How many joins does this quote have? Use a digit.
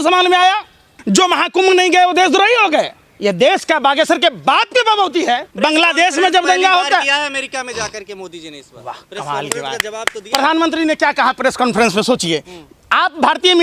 2